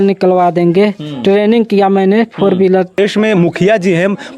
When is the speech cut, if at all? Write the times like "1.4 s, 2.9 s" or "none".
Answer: 3.0 s